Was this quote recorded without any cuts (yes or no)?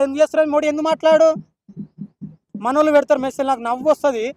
no